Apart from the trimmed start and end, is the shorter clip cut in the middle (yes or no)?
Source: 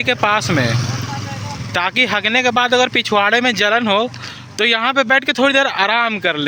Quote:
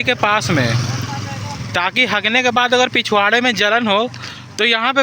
no